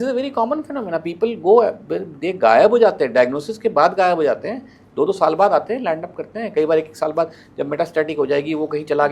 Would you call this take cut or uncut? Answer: uncut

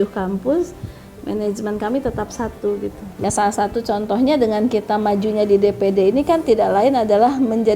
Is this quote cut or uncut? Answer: cut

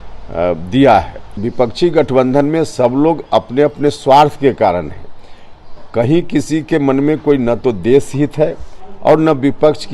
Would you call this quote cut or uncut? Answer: cut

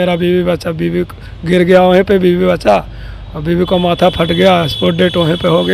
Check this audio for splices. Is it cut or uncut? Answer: uncut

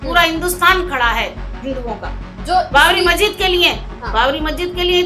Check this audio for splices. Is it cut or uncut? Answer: uncut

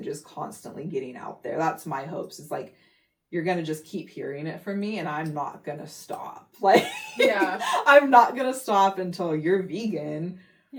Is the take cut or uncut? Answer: uncut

